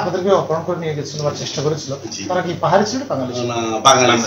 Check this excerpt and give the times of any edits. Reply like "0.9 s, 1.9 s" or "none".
none